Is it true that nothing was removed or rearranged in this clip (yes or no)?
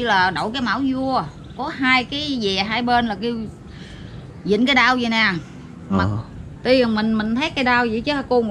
no